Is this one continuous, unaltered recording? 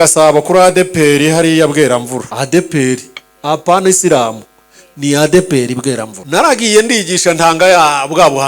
no; 2 cuts; at 2.3 s, 6.1 s

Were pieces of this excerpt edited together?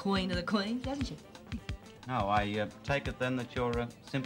yes; 1 cut; at 1.8 s

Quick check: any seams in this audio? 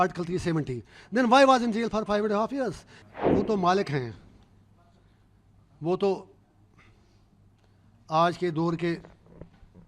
yes; 1 cut; at 2.9 s

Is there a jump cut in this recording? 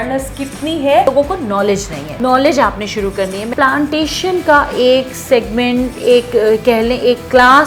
yes; 3 cuts; at 1.1 s, 2.0 s, 3.5 s

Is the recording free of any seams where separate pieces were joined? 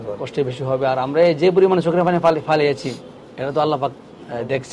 yes; 0 cuts

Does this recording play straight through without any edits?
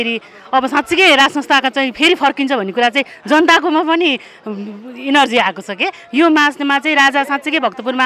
yes; 0 cuts

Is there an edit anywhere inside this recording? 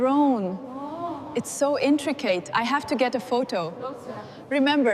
no; 0 cuts

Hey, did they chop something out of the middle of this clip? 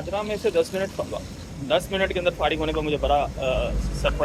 no; 0 cuts

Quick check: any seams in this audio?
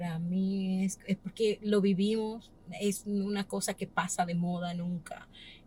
no; 0 cuts

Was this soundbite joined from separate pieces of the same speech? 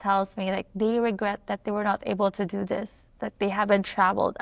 no; 0 cuts

